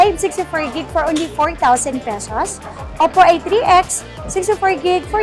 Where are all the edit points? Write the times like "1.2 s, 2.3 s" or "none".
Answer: none